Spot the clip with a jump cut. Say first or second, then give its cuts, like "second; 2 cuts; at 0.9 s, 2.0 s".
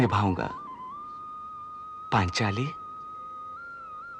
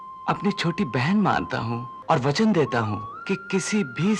second; 2 cuts; at 1.9 s, 3.1 s